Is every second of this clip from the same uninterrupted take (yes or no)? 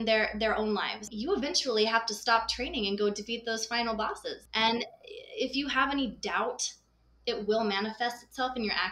no